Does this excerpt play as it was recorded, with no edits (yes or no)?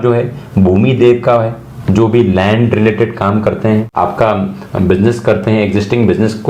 yes